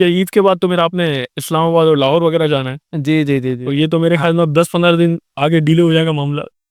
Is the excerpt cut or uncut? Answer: uncut